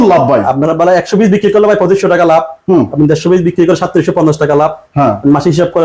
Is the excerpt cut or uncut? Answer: uncut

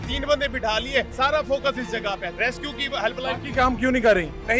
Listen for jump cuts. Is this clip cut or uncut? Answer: cut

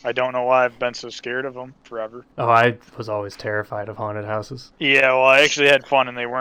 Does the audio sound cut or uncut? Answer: uncut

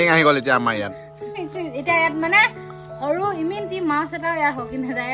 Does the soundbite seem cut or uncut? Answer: cut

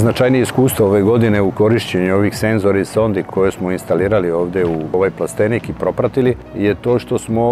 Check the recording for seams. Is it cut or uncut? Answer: cut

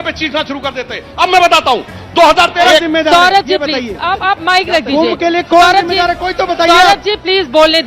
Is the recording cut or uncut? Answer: cut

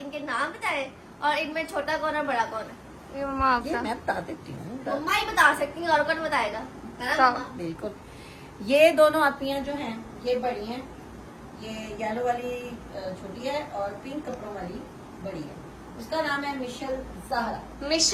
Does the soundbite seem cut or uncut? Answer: uncut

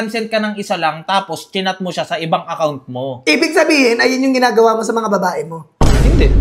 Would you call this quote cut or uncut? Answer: uncut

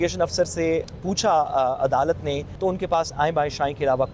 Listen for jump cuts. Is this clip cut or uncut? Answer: cut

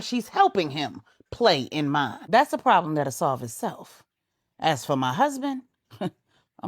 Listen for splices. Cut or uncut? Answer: cut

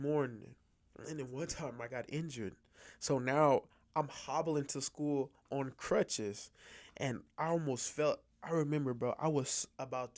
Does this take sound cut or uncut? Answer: uncut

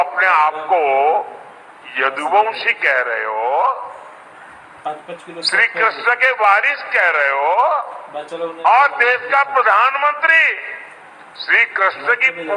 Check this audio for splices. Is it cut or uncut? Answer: uncut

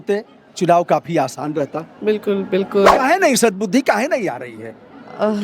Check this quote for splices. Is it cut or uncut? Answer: cut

